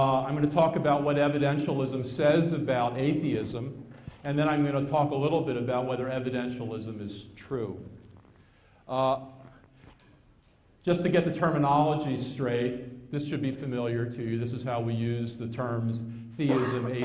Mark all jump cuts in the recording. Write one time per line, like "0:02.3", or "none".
none